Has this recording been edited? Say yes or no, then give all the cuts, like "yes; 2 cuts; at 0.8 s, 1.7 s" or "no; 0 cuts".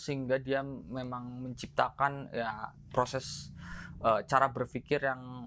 no; 0 cuts